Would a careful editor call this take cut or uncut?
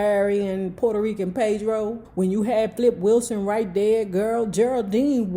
cut